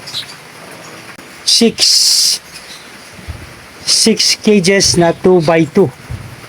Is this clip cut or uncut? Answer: cut